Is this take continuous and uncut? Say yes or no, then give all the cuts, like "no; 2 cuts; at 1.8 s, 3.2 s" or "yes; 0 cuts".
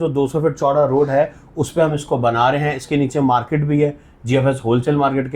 yes; 0 cuts